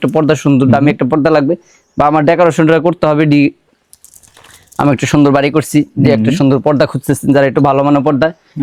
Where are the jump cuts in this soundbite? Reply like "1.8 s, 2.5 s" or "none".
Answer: none